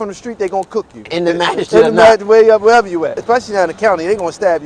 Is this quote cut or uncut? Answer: cut